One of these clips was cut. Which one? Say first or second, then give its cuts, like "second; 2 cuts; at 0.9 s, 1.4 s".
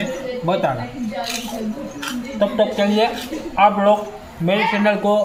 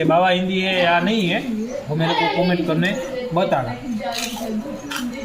second; 1 cut; at 1.8 s